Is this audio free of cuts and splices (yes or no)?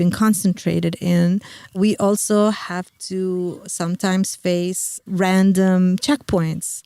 yes